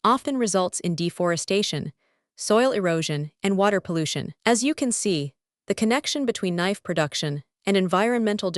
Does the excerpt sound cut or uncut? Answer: uncut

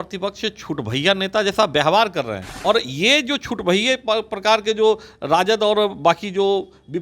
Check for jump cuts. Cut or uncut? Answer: cut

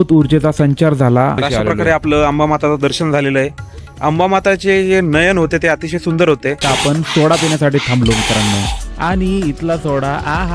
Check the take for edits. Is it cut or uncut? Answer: cut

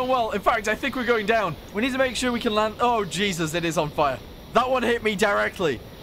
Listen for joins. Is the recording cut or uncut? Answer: cut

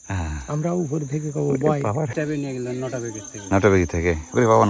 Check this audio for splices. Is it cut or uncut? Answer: cut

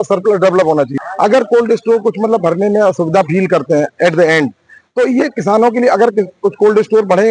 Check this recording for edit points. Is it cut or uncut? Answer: cut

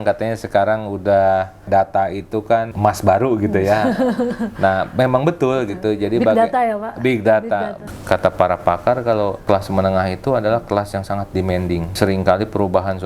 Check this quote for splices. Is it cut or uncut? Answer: cut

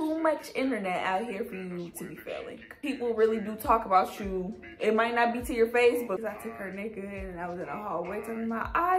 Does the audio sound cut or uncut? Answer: cut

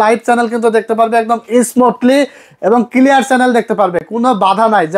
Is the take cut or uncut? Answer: uncut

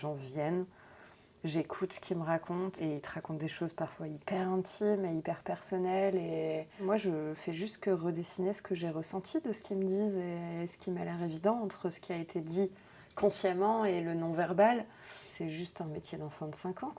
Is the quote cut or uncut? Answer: cut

